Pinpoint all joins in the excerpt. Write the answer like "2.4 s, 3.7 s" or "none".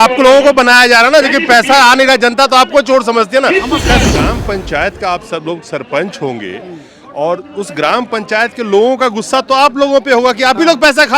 4.1 s